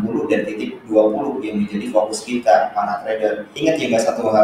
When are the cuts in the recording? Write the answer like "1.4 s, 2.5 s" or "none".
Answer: 3.5 s